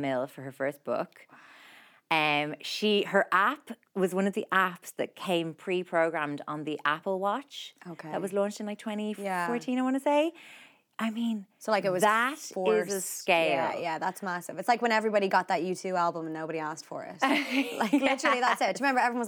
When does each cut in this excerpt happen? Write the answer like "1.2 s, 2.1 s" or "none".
none

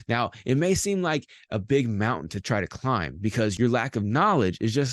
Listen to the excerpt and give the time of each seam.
3.5 s

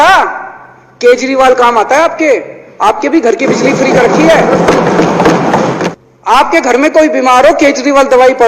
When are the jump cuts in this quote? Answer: 5.9 s

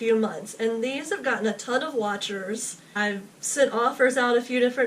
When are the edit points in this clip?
2.8 s

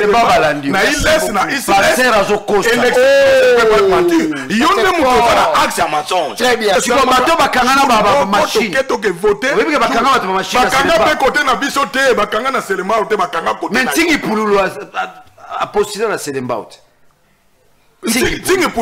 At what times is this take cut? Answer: 6.7 s

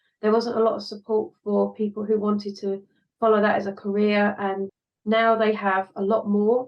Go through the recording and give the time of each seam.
4.7 s

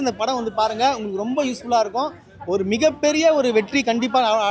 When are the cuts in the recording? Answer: none

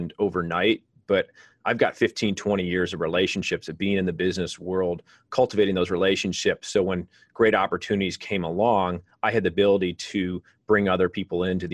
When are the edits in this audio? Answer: none

